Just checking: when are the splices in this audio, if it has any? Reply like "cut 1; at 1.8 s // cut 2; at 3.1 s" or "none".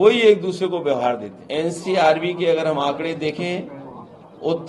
cut 1; at 1.3 s